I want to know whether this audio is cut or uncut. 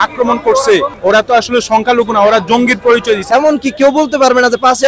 cut